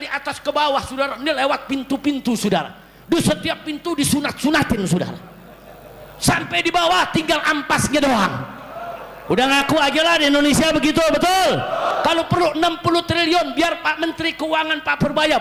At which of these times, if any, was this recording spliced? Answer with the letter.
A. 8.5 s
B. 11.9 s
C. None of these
B